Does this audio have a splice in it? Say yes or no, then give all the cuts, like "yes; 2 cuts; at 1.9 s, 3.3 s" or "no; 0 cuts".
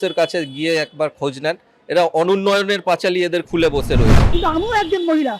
yes; 1 cut; at 4.2 s